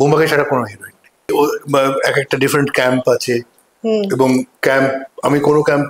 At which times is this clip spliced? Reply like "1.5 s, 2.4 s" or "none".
1.3 s